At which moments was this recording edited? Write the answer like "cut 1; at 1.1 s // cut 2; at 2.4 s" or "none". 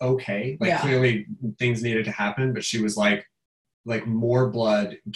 cut 1; at 3.6 s

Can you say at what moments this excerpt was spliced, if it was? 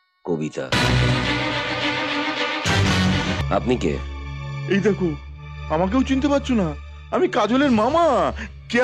cut 1; at 3.4 s

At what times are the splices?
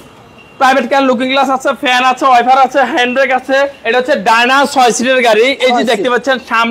cut 1; at 3.8 s

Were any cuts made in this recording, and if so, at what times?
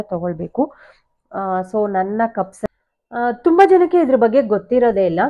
cut 1; at 2.6 s

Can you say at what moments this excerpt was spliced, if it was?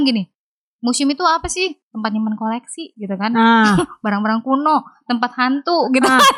none

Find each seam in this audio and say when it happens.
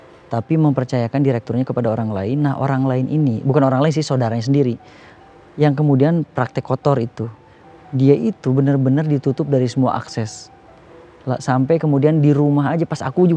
none

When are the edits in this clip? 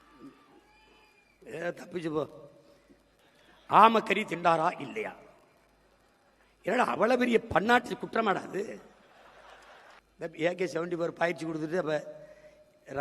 cut 1; at 10.0 s

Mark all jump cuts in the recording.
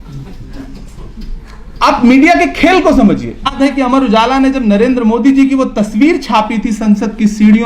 cut 1; at 3.5 s

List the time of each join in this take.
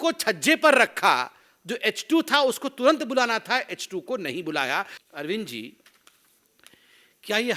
cut 1; at 5.0 s

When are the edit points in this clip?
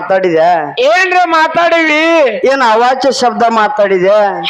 none

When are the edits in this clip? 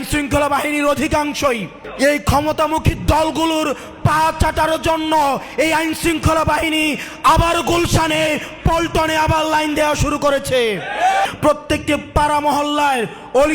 cut 1; at 1.8 s // cut 2; at 11.2 s

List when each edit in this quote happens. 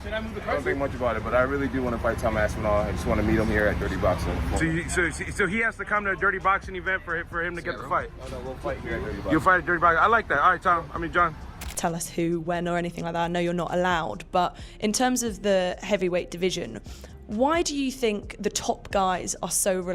cut 1; at 11.7 s

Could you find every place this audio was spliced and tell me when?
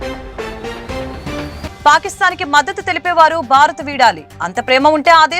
cut 1; at 1.7 s

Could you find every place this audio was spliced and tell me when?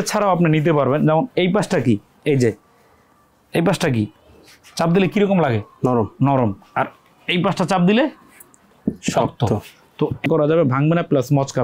cut 1; at 10.3 s

